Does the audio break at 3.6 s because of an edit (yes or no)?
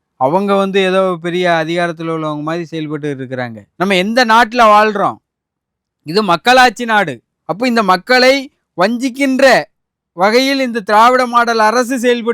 yes